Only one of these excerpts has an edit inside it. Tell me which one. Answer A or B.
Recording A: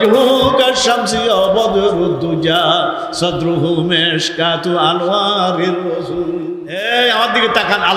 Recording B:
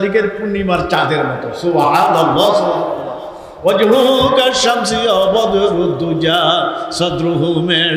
A